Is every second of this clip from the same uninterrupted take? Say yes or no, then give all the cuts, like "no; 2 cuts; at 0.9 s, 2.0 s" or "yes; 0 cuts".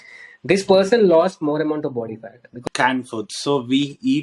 no; 1 cut; at 2.6 s